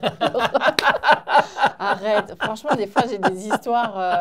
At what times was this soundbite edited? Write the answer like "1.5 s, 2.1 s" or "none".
none